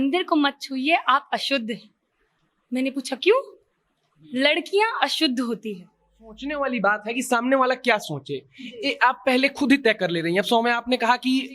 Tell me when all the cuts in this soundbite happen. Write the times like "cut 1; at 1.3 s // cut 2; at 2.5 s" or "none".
cut 1; at 6.4 s

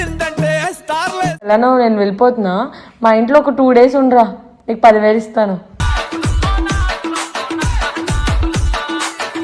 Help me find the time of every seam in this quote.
cut 1; at 1.5 s

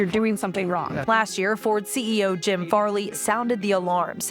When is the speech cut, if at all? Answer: cut 1; at 1.1 s

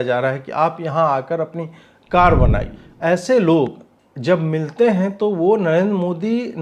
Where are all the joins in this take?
cut 1; at 2.7 s

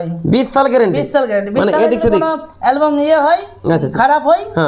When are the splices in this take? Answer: none

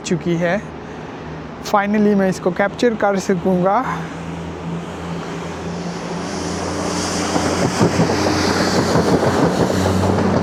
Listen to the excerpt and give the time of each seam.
none

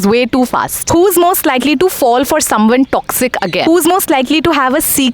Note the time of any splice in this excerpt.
cut 1; at 0.8 s // cut 2; at 3.6 s

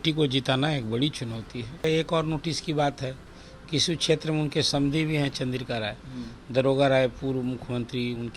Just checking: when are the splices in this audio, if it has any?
cut 1; at 1.8 s

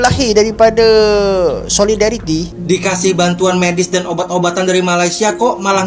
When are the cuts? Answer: cut 1; at 2.5 s

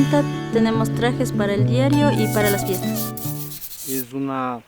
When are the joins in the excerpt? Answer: cut 1; at 3.2 s

